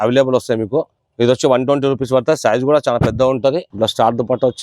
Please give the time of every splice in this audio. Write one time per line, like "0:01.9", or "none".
0:01.0
0:03.7